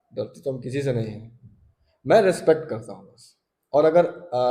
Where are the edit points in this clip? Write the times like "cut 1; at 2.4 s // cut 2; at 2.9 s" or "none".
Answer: none